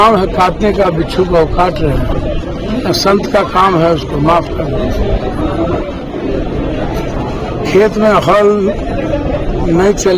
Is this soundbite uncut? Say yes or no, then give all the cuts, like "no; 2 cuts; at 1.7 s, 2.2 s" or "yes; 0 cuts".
yes; 0 cuts